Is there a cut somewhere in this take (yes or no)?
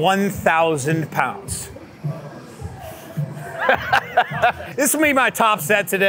yes